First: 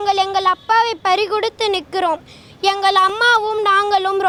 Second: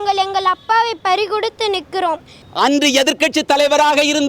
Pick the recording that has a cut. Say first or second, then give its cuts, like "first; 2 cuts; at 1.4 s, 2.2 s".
second; 1 cut; at 2.4 s